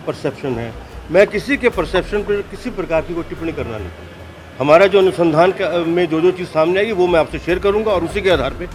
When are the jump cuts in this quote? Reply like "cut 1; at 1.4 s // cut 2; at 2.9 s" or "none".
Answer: none